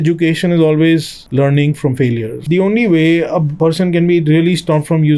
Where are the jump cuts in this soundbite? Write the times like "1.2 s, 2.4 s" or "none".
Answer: 2.4 s